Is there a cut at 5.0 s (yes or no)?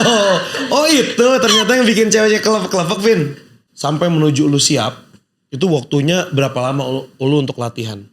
no